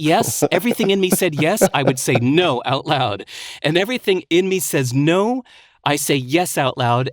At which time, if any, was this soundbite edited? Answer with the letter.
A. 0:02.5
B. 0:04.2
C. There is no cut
B